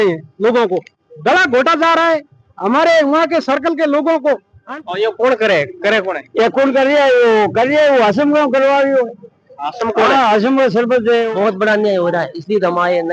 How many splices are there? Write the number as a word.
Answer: two